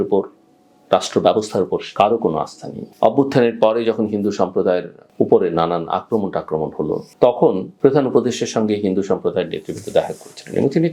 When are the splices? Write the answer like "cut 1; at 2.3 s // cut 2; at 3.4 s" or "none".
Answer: cut 1; at 2.8 s

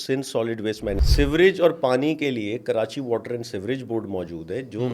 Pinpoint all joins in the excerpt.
cut 1; at 1.0 s

